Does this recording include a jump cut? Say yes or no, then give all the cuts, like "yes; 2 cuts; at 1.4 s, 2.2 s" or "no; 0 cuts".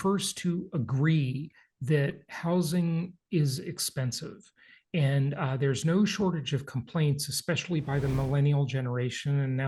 no; 0 cuts